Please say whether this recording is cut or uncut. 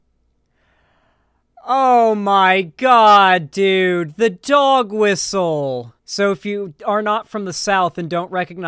cut